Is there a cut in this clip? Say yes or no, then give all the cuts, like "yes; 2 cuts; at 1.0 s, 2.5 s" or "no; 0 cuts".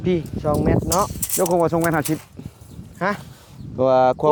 no; 0 cuts